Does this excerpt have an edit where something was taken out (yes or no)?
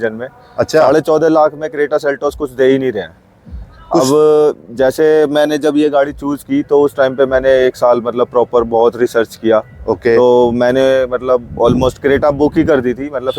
no